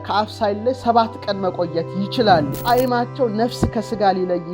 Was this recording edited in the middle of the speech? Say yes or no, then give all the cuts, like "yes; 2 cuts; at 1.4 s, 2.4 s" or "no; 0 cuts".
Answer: yes; 1 cut; at 2.5 s